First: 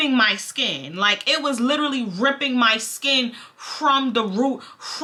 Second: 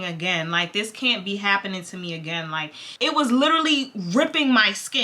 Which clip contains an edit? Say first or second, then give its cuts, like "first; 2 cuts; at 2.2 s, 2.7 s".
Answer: second; 1 cut; at 2.8 s